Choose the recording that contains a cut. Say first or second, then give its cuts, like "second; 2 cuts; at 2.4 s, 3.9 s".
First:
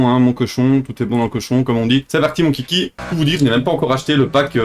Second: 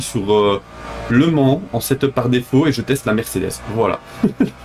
first; 2 cuts; at 2.1 s, 3.0 s